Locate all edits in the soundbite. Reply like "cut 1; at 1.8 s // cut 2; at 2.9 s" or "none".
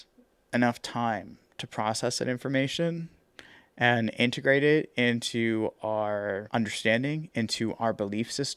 cut 1; at 6.4 s

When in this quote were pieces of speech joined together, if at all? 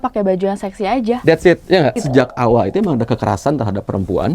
cut 1; at 2.0 s

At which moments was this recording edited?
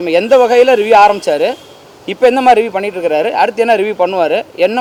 none

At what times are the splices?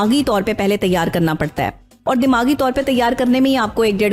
none

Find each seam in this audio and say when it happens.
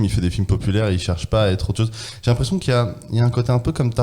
none

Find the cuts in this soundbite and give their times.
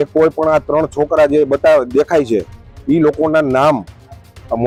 none

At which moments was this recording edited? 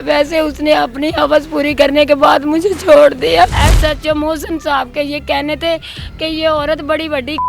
cut 1; at 3.5 s

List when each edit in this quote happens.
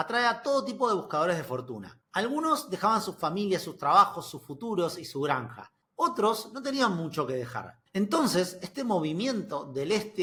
none

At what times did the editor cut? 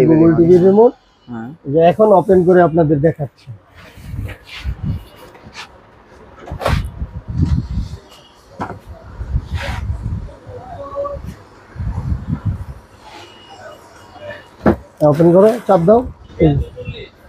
cut 1; at 16.2 s

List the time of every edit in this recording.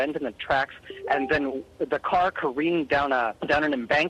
cut 1; at 1.0 s

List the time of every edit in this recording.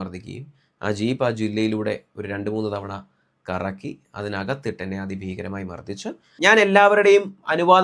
cut 1; at 6.2 s

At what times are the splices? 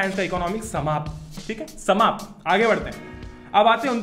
none

